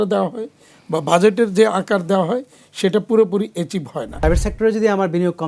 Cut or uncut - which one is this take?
cut